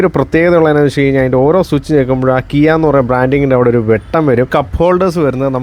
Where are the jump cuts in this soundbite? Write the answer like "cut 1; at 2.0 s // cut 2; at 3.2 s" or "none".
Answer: cut 1; at 4.5 s